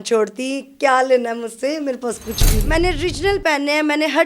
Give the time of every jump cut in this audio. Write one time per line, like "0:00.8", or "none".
0:02.6